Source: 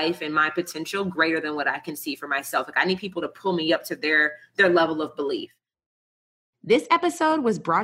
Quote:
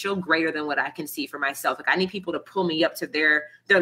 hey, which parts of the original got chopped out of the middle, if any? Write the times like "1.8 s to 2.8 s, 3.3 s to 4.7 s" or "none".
none

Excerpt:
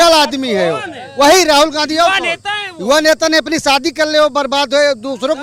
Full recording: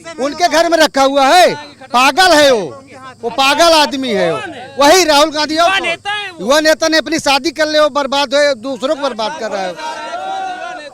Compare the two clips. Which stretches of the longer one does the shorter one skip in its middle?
none

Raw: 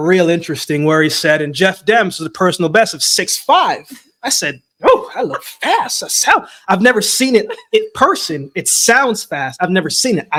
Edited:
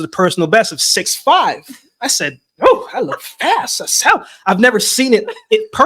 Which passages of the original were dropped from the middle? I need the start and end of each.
none

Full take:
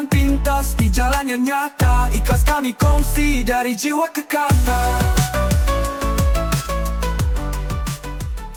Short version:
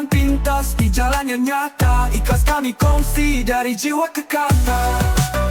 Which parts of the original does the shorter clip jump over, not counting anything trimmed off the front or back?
none

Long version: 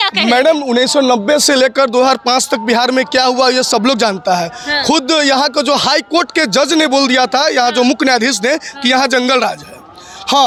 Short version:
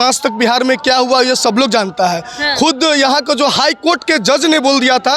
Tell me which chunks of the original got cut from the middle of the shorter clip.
none

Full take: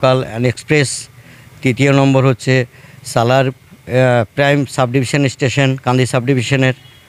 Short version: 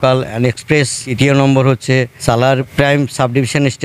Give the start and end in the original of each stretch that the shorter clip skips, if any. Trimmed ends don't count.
1.0 s to 1.6 s, 3.2 s to 4.2 s

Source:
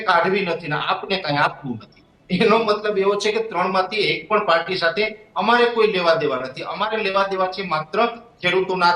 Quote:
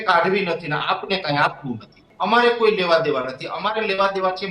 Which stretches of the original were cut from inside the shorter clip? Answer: 2.0 s to 5.2 s

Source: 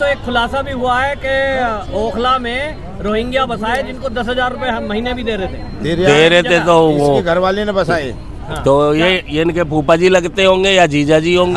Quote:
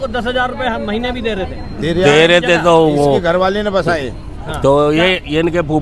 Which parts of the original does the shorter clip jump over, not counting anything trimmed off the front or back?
none

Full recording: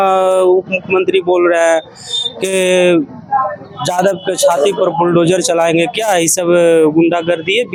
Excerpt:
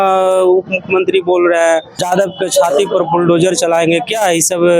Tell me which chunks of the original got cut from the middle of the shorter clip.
1.9 s to 3.8 s

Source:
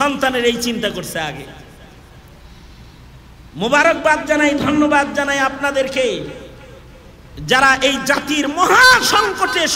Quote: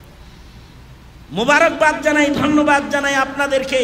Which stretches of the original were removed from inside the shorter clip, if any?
none

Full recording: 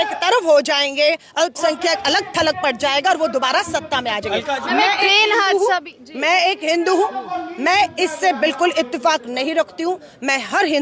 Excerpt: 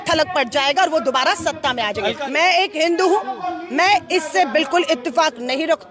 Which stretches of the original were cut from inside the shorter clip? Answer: 4.5 s to 6.1 s

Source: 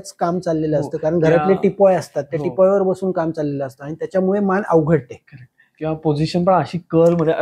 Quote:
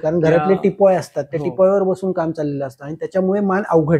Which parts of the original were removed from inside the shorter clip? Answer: none

